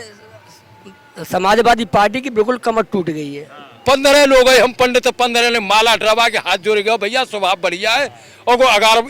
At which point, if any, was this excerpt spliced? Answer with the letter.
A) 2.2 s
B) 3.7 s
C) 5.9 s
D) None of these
B